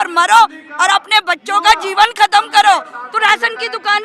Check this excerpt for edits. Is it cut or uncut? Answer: cut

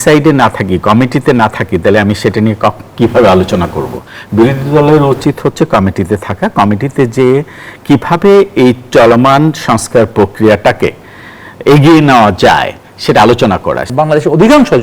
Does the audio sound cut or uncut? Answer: cut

